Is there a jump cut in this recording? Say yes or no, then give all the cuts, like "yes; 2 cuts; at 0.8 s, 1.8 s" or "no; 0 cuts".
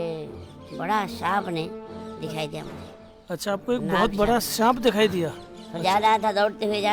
no; 0 cuts